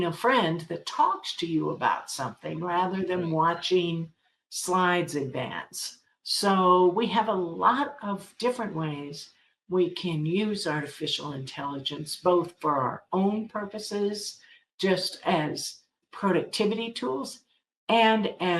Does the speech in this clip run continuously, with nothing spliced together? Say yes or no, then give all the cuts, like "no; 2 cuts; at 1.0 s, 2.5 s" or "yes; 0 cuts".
no; 1 cut; at 15.9 s